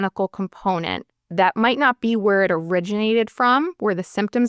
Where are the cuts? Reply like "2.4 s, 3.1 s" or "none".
none